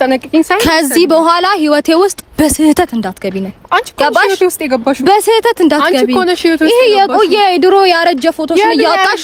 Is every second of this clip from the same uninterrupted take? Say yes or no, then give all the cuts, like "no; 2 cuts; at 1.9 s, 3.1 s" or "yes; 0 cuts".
yes; 0 cuts